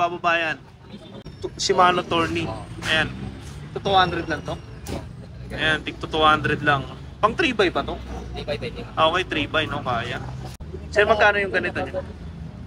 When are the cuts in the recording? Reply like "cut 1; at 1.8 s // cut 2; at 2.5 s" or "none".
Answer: cut 1; at 1.2 s // cut 2; at 10.8 s